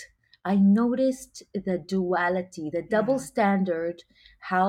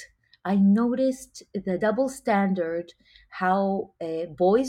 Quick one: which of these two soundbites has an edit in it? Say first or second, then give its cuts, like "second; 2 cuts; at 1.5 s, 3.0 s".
second; 1 cut; at 1.8 s